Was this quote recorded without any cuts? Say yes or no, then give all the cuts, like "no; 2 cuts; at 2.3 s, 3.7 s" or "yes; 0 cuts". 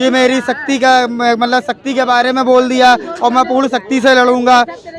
yes; 0 cuts